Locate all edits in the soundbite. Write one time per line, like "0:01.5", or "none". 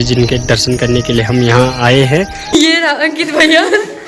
0:02.5